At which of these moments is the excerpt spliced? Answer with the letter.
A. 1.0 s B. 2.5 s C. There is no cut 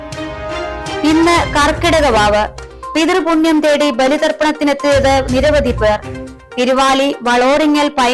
C